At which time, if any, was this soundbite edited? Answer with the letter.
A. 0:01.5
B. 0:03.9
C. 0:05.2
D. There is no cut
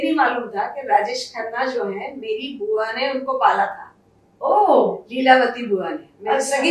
D